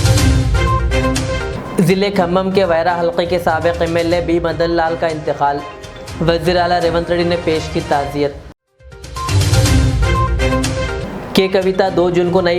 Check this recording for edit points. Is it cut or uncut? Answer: cut